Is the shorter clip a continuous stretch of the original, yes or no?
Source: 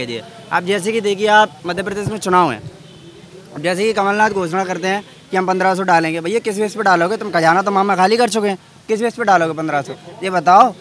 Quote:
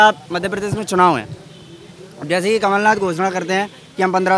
yes